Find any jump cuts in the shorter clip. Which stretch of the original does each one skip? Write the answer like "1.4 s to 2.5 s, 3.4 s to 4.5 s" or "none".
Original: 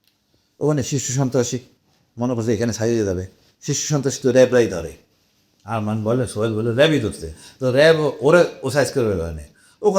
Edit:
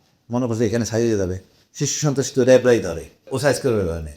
5.1 s to 8.6 s